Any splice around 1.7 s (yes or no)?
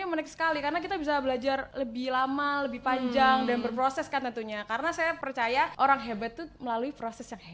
yes